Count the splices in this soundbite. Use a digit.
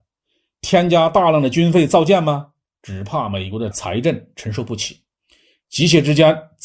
0